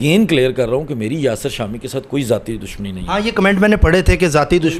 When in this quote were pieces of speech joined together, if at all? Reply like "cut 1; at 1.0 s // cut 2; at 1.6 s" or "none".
none